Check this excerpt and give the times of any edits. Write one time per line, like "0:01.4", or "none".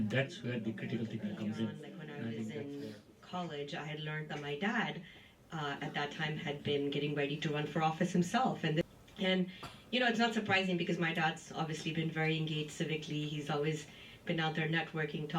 0:02.6
0:08.9